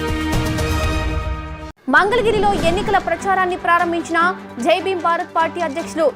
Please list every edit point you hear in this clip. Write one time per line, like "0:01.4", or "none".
none